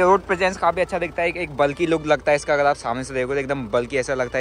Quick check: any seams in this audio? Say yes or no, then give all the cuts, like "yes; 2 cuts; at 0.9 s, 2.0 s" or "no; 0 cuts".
no; 0 cuts